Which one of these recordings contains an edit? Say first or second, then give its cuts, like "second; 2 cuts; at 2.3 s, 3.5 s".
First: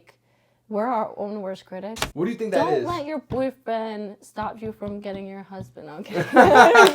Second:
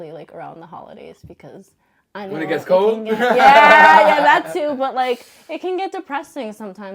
first; 1 cut; at 2.0 s